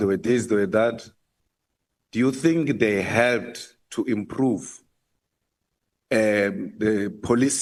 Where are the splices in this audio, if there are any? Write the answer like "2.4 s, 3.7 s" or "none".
none